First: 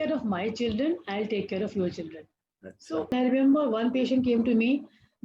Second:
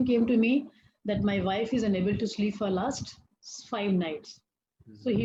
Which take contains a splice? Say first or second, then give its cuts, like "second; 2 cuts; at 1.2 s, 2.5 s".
first; 1 cut; at 3.1 s